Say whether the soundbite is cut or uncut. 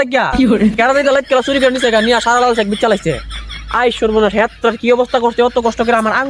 uncut